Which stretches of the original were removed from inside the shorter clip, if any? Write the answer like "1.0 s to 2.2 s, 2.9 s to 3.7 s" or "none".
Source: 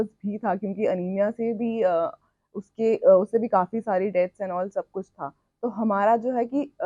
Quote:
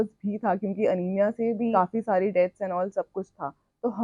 1.7 s to 3.5 s